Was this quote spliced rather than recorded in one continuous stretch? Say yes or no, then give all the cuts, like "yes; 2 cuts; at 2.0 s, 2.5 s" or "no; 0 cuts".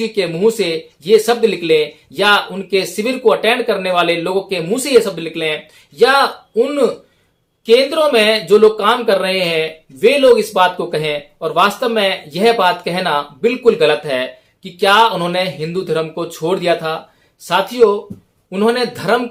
no; 0 cuts